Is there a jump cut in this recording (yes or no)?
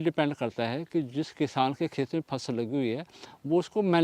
no